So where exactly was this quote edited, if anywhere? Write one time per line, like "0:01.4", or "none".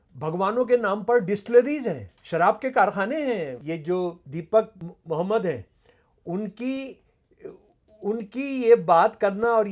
0:02.1
0:03.6